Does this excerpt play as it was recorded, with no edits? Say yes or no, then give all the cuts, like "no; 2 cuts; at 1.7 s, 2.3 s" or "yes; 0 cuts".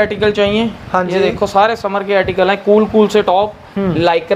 yes; 0 cuts